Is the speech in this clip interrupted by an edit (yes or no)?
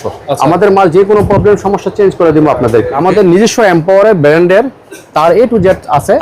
yes